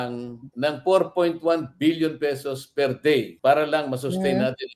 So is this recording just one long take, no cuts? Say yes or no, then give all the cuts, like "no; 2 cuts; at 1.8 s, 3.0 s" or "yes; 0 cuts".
yes; 0 cuts